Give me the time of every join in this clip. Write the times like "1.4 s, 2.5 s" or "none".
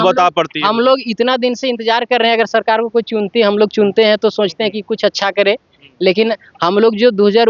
none